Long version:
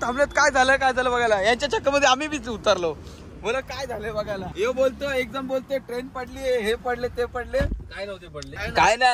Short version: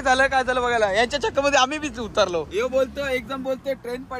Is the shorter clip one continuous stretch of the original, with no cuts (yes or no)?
no